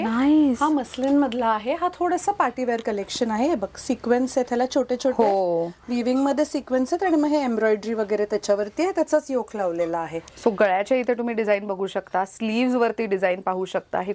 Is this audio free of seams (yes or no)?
yes